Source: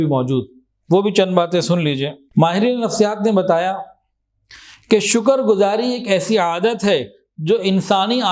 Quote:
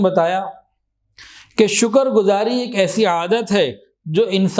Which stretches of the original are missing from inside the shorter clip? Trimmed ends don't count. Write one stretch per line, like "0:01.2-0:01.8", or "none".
none